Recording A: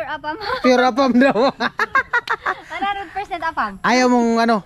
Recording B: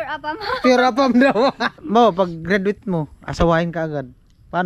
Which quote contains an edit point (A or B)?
B